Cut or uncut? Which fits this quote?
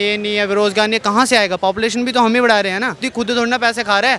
cut